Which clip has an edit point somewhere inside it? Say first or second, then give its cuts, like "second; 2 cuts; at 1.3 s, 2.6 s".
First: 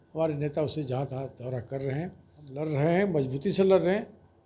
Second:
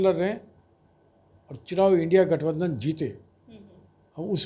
first; 1 cut; at 2.6 s